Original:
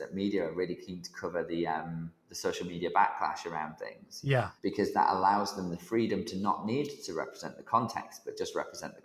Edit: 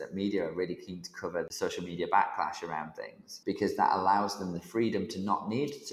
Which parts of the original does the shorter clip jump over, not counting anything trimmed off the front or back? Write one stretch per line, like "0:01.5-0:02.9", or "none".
0:01.5-0:02.3
0:04.2-0:04.5